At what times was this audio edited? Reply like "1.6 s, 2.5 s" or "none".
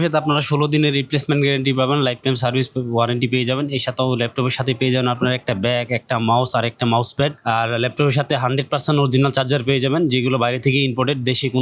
none